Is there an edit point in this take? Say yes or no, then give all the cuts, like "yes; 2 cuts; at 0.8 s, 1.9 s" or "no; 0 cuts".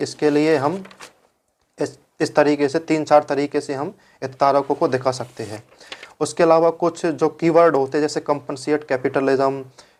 no; 0 cuts